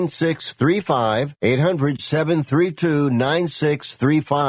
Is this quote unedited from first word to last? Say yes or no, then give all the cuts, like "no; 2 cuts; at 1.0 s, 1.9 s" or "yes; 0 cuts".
no; 1 cut; at 1.3 s